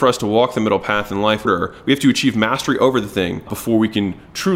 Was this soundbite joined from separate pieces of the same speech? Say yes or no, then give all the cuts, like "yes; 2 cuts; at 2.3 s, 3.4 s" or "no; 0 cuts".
yes; 2 cuts; at 1.5 s, 3.5 s